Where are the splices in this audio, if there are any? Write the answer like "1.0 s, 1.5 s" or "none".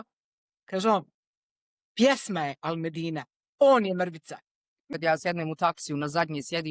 4.8 s